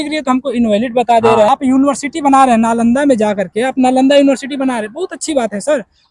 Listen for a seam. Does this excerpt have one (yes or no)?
yes